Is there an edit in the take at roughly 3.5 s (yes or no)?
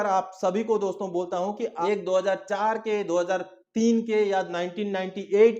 no